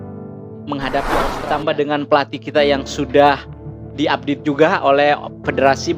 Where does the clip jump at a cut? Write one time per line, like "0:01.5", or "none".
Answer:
0:01.4

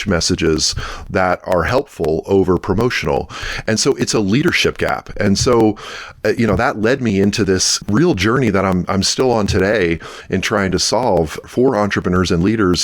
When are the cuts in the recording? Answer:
0:07.7
0:11.4

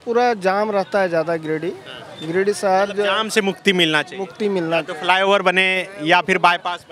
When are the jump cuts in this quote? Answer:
none

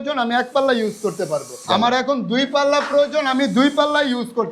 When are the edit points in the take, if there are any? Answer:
0:01.6

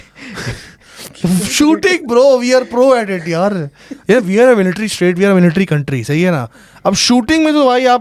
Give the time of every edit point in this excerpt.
none

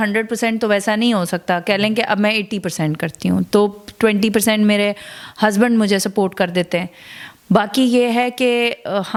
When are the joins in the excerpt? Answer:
none

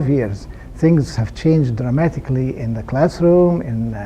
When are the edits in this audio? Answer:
0:02.7

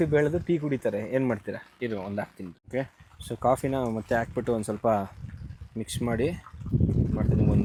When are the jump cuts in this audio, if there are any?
none

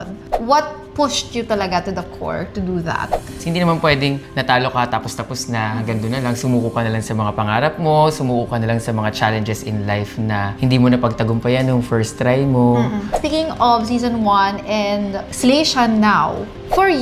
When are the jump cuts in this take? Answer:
0:03.3
0:10.5
0:13.2

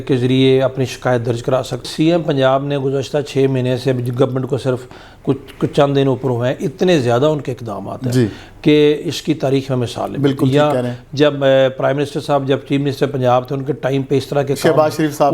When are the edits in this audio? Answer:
0:01.9

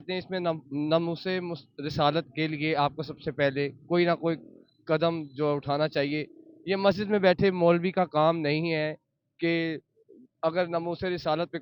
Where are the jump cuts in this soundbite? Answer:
none

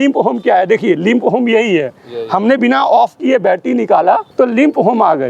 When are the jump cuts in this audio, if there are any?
0:04.3

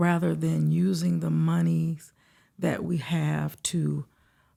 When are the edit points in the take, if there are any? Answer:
none

